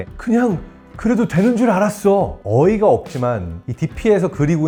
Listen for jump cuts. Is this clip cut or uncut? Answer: uncut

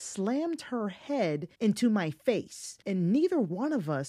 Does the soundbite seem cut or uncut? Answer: cut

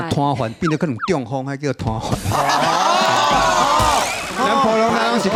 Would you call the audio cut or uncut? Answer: uncut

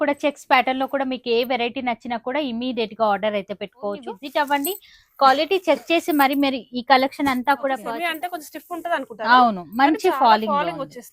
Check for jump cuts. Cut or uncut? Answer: cut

